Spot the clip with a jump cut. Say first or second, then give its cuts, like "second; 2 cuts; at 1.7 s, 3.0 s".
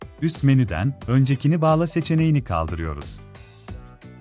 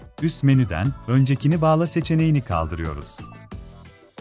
first; 1 cut; at 3.0 s